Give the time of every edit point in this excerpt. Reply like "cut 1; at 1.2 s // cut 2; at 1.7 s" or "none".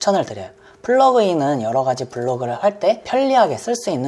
cut 1; at 3.0 s